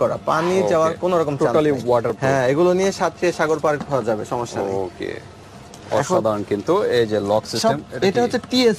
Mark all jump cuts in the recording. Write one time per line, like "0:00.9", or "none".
none